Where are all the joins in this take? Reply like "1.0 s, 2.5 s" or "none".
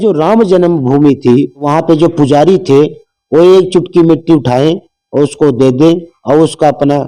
1.6 s